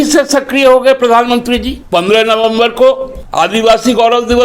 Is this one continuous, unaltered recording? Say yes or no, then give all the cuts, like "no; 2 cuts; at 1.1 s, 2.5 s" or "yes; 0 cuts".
no; 2 cuts; at 1.8 s, 3.2 s